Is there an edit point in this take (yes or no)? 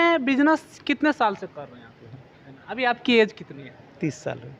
yes